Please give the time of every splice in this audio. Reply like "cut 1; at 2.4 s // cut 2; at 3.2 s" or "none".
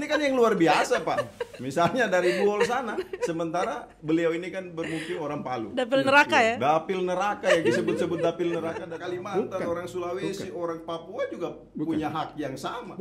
cut 1; at 8.9 s